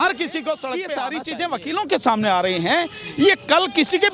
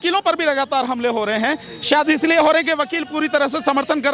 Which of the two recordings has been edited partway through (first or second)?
first